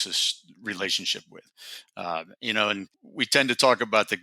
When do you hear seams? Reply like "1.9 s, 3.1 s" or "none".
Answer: 3.0 s